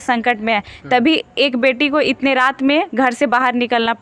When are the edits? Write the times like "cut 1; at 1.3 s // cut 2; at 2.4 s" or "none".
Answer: none